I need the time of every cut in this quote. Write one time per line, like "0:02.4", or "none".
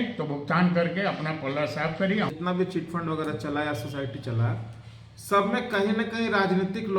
0:02.3